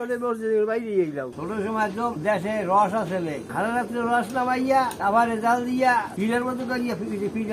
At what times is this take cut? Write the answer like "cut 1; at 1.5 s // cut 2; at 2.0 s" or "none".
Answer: cut 1; at 1.3 s